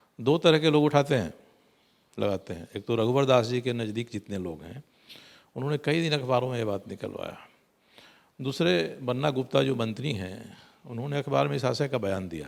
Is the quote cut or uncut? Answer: uncut